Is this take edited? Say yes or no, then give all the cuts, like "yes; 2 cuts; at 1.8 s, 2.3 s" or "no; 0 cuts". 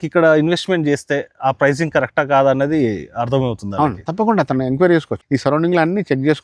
yes; 1 cut; at 5.2 s